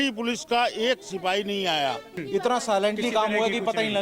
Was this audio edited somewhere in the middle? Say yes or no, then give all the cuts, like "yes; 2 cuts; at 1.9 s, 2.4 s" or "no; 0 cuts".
yes; 1 cut; at 2.2 s